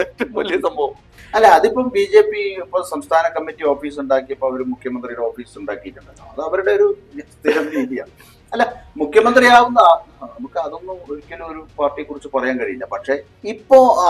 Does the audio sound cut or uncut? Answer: uncut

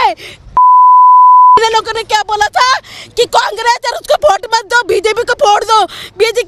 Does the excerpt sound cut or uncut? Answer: uncut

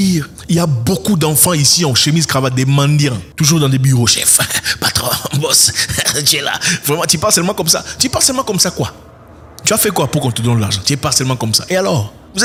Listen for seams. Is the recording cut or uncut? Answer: uncut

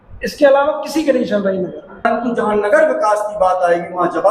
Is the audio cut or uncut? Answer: cut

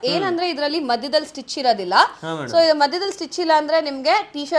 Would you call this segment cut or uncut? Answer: uncut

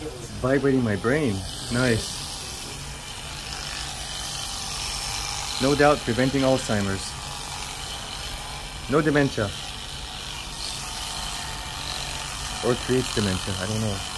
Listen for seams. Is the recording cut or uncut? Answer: uncut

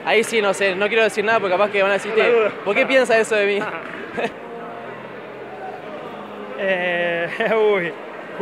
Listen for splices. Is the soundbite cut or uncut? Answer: cut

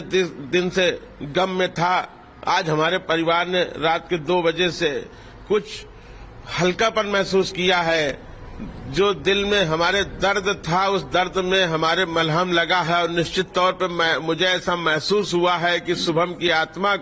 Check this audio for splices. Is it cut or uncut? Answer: uncut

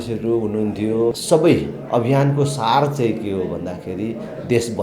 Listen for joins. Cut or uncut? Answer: cut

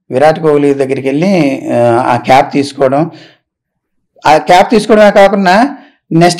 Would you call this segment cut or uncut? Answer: uncut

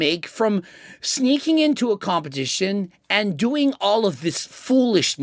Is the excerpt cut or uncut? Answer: uncut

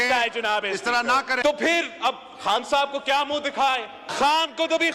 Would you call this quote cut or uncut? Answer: cut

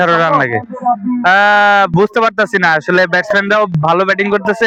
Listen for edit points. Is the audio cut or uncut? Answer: uncut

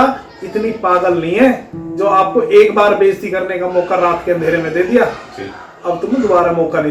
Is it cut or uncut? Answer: uncut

